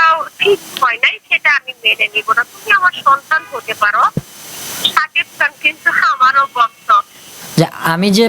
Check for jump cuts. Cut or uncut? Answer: cut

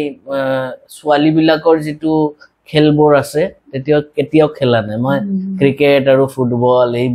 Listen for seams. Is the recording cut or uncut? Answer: uncut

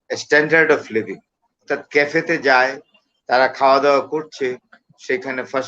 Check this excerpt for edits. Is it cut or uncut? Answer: cut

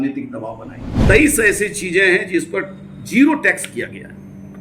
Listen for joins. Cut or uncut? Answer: cut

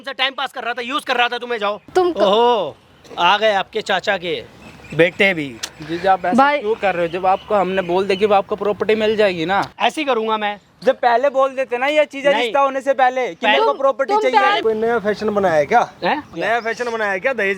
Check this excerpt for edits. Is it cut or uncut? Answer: cut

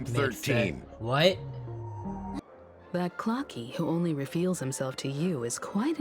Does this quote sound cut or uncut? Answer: cut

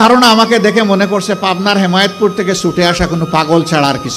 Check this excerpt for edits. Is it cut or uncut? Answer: uncut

